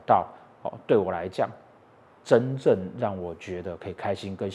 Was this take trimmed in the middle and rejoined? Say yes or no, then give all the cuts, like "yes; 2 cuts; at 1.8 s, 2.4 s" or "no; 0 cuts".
no; 0 cuts